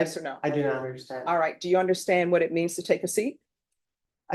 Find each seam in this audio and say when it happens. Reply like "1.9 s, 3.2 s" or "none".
none